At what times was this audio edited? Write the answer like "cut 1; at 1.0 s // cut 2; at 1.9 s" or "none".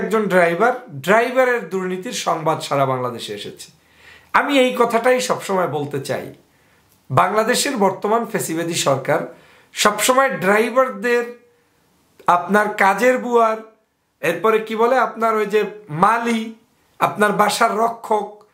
none

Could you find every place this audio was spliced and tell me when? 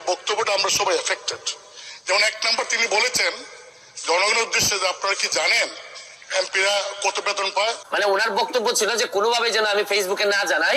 cut 1; at 7.8 s

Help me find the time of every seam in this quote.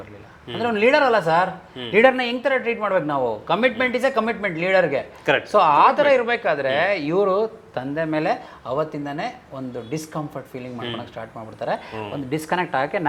none

